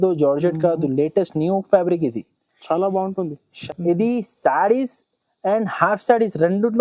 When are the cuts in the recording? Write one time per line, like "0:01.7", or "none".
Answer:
0:03.6